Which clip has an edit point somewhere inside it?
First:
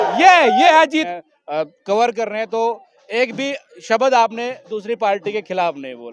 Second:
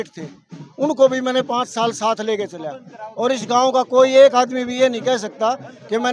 first; 1 cut; at 1.0 s

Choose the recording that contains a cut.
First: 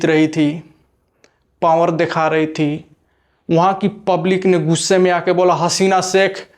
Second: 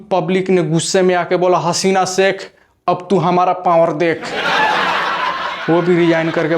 second; 2 cuts; at 4.4 s, 5.6 s

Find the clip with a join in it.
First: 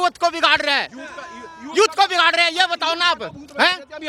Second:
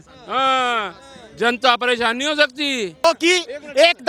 second; 1 cut; at 3.0 s

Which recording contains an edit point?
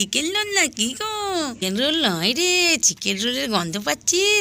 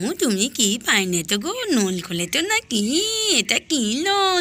first; 1 cut; at 1.6 s

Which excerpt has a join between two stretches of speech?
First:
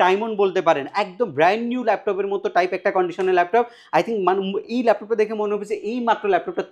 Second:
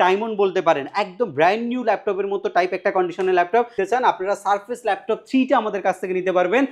second; 1 cut; at 3.7 s

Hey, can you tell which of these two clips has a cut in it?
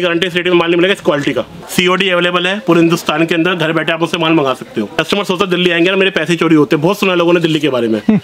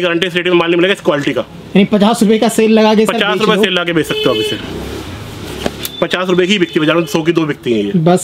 first; 2 cuts; at 1.5 s, 5.0 s

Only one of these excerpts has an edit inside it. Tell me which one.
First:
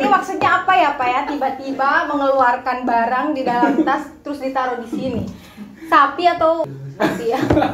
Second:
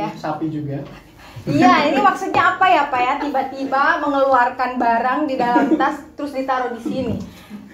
first; 1 cut; at 6.8 s

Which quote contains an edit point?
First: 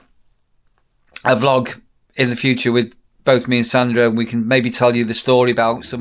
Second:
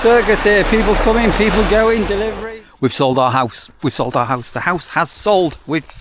second; 1 cut; at 2.3 s

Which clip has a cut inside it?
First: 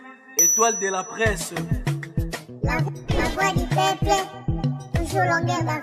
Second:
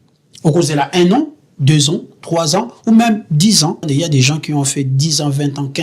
second; 1 cut; at 3.9 s

